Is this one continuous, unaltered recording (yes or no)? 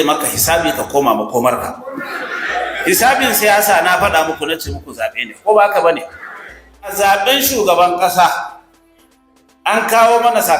no